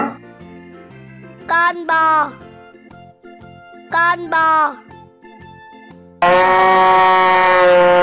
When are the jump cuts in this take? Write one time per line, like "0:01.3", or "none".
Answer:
0:04.8
0:06.2